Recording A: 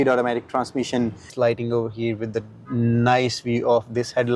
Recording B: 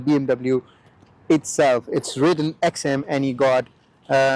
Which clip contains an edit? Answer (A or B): A